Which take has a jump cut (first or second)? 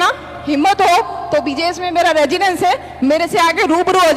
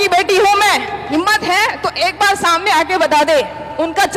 second